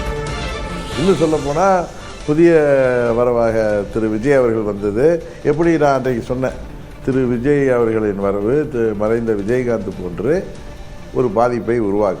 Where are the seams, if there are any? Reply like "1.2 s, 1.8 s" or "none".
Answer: 0.9 s